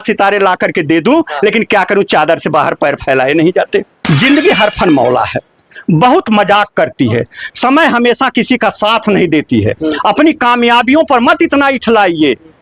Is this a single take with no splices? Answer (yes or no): no